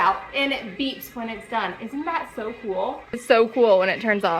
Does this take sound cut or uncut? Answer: cut